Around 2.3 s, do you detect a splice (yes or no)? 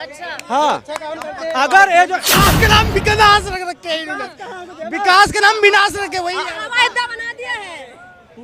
yes